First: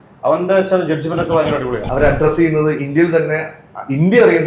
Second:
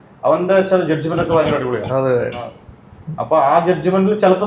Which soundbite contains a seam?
first; 1 cut; at 1.8 s

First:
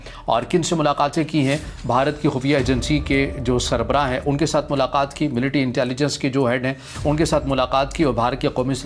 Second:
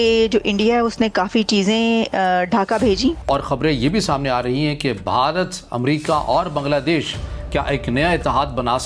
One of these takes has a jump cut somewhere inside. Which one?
second; 1 cut; at 3.2 s

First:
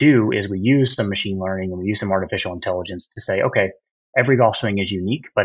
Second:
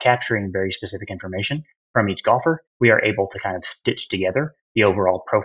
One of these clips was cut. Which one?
second; 1 cut; at 2.7 s

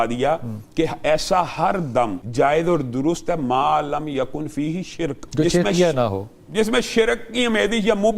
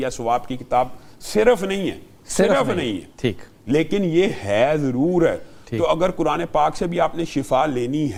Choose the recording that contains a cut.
first; 2 cuts; at 2.2 s, 5.2 s

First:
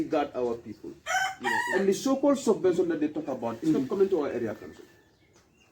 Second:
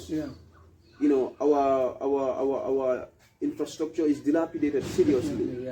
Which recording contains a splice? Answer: first; 1 cut; at 1.5 s

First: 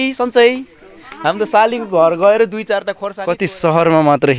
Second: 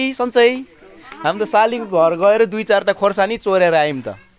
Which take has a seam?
first; 1 cut; at 3.0 s

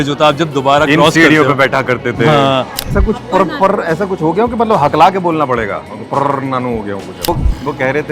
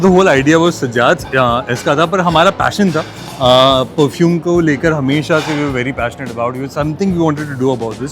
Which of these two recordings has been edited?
first; 2 cuts; at 2.9 s, 7.2 s

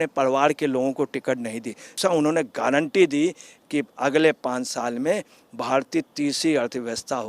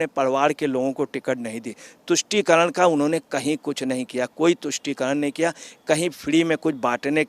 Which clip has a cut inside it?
first; 1 cut; at 2.0 s

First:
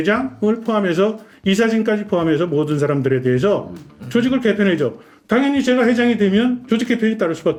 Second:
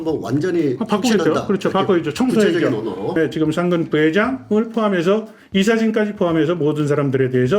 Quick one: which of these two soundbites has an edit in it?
second; 1 cut; at 3.1 s

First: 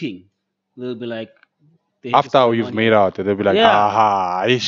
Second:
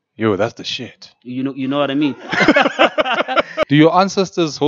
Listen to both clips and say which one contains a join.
second; 1 cut; at 3.6 s

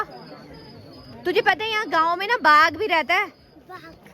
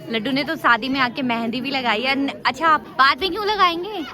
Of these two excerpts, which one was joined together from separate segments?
second; 1 cut; at 2.9 s

